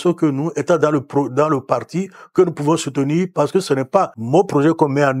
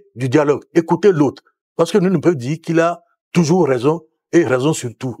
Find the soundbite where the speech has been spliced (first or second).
first